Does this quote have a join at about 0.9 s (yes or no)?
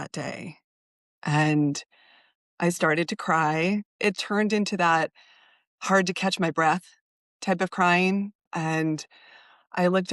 yes